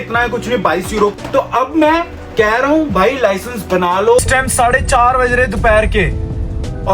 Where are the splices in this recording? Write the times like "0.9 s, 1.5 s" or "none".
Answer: 1.1 s, 4.2 s